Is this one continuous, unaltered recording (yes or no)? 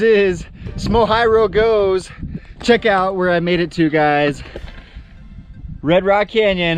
yes